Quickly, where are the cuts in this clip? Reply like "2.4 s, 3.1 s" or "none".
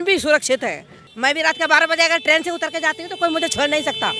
1.1 s

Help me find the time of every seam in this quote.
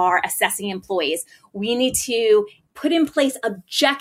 2.6 s

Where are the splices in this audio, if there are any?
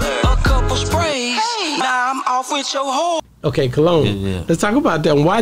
none

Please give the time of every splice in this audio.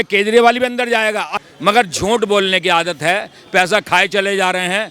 1.3 s

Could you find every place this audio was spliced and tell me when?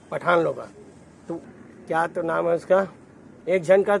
1.5 s

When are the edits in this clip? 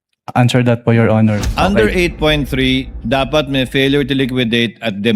1.5 s

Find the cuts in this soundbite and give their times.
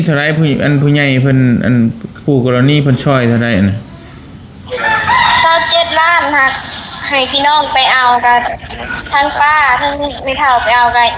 none

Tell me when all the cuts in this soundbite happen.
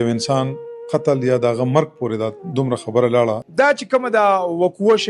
3.4 s

